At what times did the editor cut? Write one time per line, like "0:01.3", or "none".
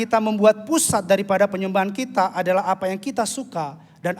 none